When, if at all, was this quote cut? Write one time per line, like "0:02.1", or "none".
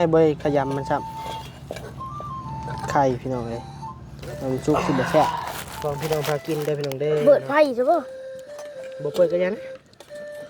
0:05.3